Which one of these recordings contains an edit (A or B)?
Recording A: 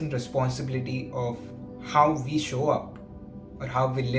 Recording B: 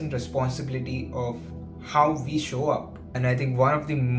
B